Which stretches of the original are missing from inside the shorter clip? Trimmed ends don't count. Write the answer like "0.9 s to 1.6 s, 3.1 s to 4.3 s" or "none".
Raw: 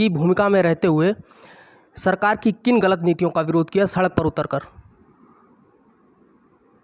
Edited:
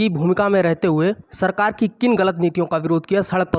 1.3 s to 1.9 s